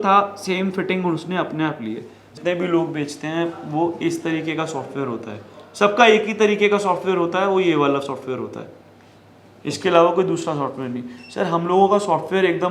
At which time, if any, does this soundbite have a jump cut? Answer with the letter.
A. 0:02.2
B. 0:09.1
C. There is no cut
A